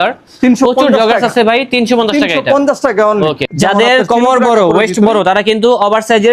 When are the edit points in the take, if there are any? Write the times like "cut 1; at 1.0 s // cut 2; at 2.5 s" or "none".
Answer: cut 1; at 3.4 s